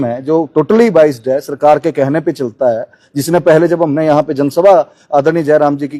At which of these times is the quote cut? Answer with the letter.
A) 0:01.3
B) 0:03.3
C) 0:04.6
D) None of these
D